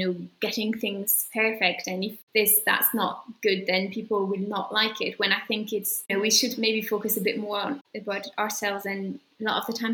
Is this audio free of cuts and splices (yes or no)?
yes